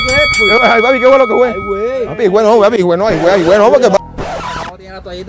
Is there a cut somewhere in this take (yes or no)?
yes